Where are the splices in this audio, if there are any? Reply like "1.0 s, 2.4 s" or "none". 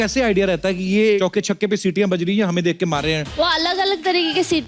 1.2 s, 3.4 s